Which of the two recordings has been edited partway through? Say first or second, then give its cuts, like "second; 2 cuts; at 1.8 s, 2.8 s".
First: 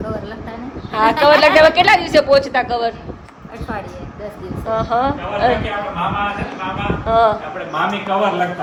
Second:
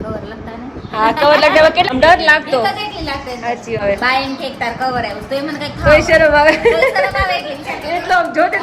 second; 2 cuts; at 1.9 s, 3.8 s